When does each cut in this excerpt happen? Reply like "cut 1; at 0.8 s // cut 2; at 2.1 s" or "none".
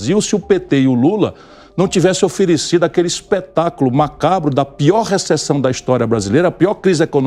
none